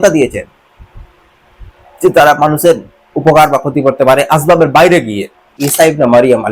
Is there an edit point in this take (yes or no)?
yes